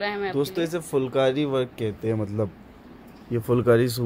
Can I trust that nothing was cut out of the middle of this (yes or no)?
yes